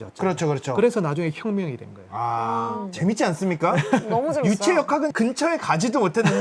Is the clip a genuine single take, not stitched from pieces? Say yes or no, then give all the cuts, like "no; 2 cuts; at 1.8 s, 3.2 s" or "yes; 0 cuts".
no; 1 cut; at 2.8 s